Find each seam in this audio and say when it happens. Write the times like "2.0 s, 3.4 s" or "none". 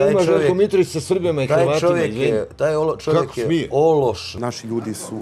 4.3 s

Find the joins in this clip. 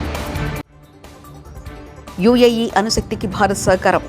1.5 s

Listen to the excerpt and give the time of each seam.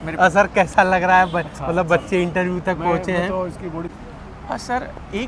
3.9 s

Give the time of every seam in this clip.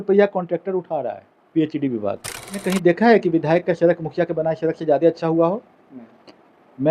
2.6 s

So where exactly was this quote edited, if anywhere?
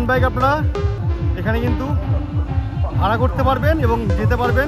none

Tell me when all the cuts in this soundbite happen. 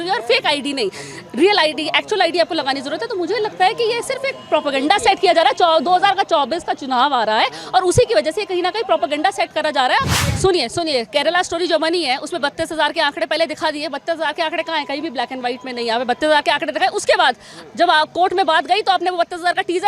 10.1 s

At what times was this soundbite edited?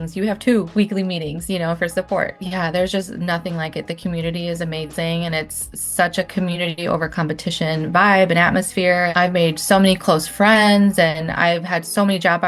9.1 s

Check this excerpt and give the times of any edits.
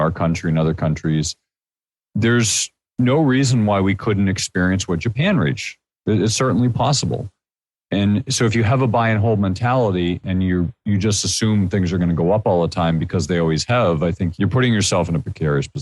14.3 s

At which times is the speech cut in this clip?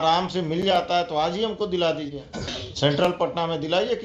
2.6 s

